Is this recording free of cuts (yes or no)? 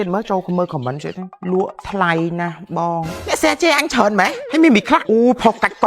no